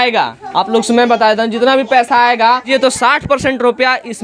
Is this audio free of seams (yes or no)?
no